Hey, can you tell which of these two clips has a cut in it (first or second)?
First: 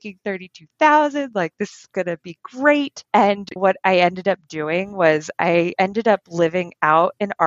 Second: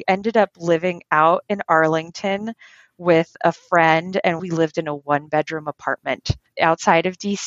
second